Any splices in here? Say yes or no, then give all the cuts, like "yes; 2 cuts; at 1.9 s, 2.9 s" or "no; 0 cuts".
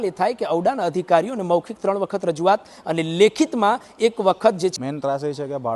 yes; 1 cut; at 4.8 s